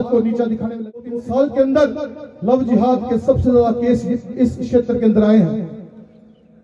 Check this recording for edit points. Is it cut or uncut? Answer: cut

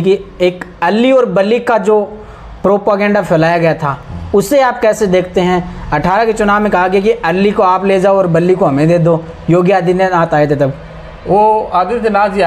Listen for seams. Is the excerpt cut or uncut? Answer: uncut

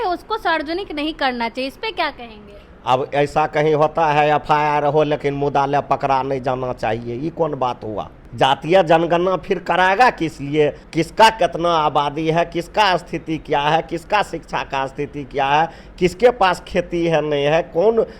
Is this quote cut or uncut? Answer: cut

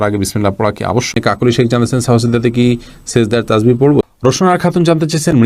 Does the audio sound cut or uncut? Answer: cut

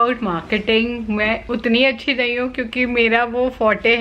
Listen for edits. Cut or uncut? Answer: cut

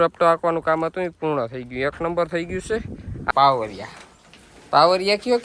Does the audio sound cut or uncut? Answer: cut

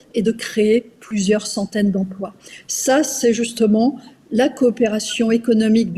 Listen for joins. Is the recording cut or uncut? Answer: uncut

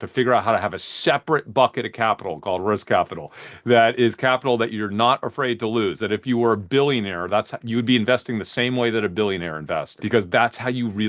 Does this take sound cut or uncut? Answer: cut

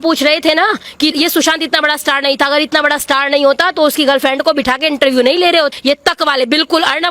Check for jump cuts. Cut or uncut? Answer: cut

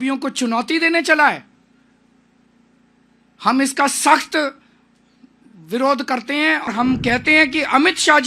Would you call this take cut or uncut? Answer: cut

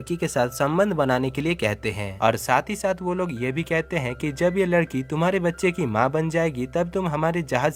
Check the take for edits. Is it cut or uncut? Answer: uncut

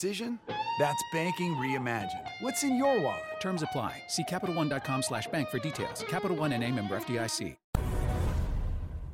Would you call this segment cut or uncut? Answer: cut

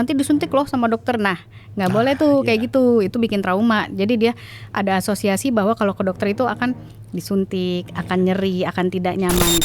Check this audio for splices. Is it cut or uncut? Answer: uncut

